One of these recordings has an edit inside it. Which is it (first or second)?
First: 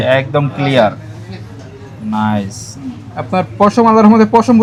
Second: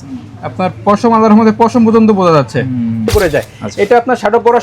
second